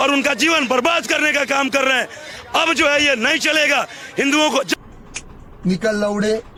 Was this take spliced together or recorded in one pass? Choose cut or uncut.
uncut